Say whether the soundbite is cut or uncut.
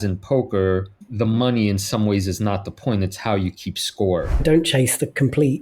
cut